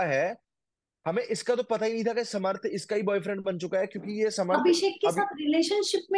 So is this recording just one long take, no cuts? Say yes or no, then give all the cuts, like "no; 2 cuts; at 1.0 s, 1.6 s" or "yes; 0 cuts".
yes; 0 cuts